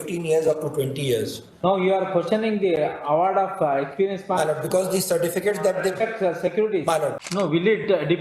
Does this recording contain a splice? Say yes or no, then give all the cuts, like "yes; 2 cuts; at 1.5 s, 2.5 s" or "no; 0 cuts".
yes; 1 cut; at 7.2 s